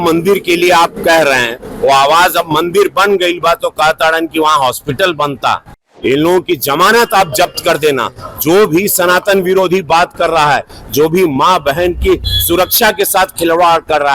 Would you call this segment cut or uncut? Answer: cut